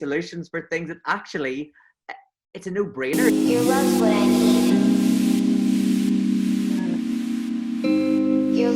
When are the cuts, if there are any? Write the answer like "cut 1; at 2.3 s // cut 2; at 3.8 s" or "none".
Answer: cut 1; at 3.1 s